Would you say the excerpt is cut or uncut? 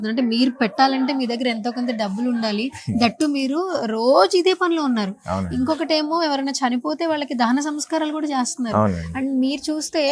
uncut